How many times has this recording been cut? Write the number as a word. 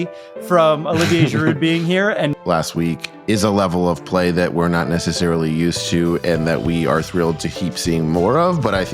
one